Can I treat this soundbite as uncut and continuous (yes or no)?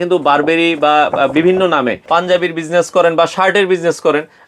no